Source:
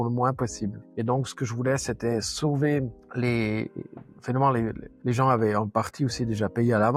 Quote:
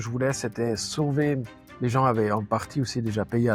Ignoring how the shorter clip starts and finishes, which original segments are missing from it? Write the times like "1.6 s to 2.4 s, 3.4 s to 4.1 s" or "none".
3.0 s to 4.8 s